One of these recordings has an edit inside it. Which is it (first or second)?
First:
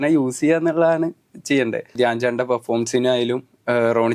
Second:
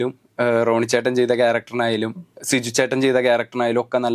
first